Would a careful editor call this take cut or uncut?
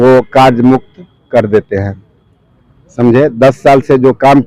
uncut